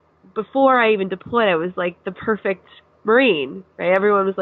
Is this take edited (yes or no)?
no